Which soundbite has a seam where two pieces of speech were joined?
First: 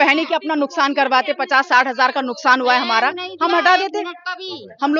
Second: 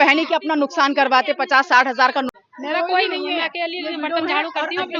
second; 1 cut; at 2.3 s

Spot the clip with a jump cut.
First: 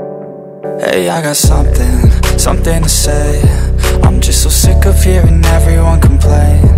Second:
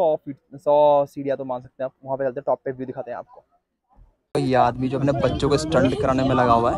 second; 1 cut; at 4.1 s

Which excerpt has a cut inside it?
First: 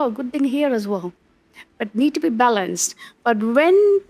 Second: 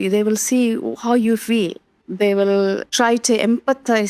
second; 2 cuts; at 2.0 s, 2.9 s

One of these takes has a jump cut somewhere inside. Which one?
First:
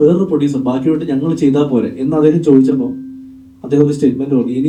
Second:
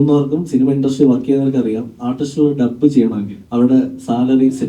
second; 1 cut; at 3.3 s

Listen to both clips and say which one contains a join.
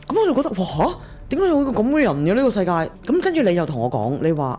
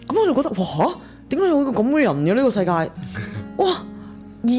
first; 1 cut; at 2.9 s

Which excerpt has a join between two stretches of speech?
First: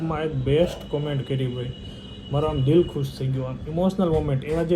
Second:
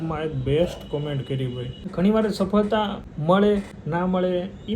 second; 3 cuts; at 1.8 s, 3.1 s, 3.8 s

